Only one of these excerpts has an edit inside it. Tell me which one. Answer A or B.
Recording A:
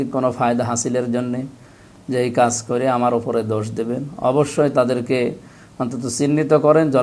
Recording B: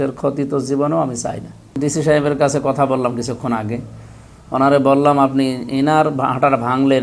B